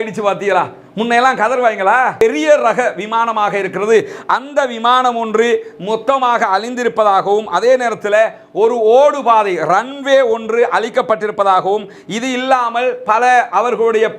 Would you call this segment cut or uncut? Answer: cut